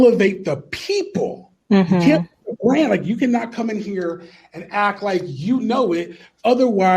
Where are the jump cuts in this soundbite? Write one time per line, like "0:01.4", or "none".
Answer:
0:01.5